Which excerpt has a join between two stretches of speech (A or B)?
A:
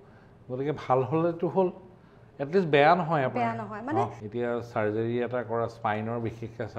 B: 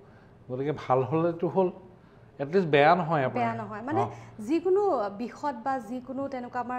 A